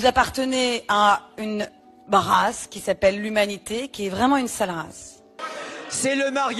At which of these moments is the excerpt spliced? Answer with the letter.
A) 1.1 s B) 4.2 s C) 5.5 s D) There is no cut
C